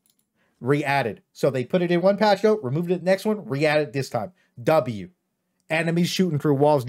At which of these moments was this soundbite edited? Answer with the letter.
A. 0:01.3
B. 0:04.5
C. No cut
C